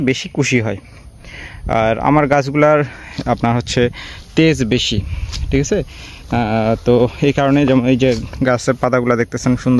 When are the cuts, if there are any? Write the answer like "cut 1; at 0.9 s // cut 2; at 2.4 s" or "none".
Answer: none